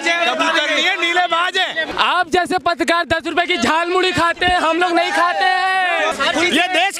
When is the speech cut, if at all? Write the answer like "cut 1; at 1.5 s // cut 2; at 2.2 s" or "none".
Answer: cut 1; at 1.8 s // cut 2; at 6.0 s

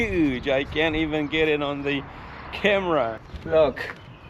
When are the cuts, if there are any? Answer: cut 1; at 3.3 s

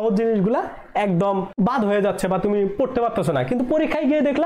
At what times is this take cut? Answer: cut 1; at 1.5 s

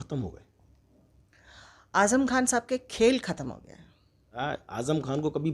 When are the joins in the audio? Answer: cut 1; at 4.4 s

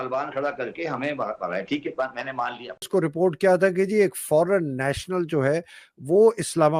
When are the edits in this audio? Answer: cut 1; at 2.9 s

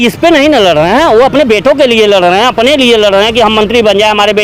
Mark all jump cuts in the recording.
none

